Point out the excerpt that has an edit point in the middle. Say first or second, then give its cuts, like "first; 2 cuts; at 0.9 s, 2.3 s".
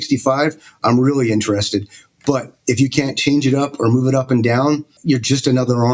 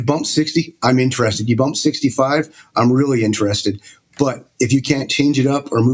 first; 1 cut; at 4.9 s